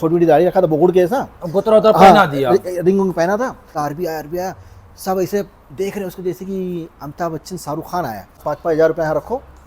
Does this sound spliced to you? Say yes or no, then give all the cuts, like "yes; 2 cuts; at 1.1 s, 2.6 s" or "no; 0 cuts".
yes; 2 cuts; at 3.7 s, 8.4 s